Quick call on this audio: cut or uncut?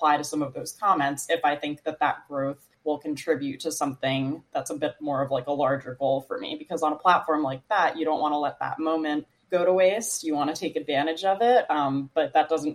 cut